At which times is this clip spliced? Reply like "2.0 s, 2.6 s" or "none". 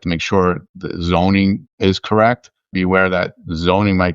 2.7 s